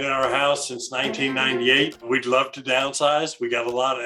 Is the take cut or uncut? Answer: cut